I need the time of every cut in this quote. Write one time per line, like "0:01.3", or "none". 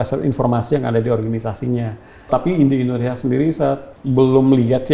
0:02.3
0:03.9